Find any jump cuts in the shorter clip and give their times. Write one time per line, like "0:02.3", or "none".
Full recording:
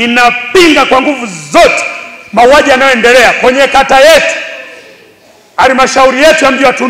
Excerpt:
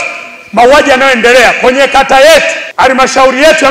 0:02.6